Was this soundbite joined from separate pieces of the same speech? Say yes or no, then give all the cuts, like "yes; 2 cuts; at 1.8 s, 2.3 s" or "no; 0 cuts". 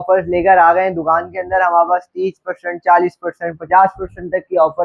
no; 0 cuts